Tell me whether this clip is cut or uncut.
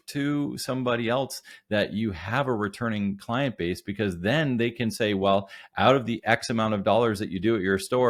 uncut